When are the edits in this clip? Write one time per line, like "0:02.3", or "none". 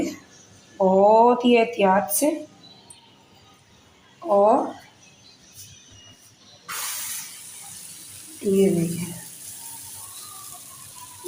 none